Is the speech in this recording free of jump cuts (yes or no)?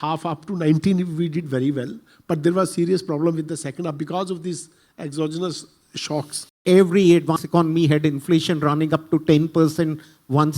no